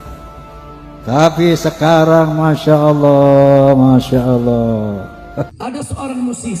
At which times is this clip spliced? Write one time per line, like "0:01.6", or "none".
0:05.7